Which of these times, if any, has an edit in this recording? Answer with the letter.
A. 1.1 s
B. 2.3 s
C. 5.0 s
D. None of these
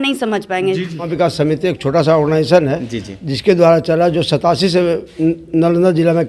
A